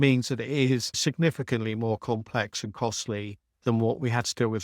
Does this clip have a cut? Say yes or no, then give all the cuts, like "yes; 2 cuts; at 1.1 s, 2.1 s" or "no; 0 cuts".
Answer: yes; 1 cut; at 1.0 s